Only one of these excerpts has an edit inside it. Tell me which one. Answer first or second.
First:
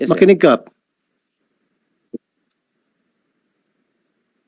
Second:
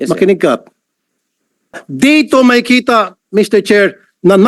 second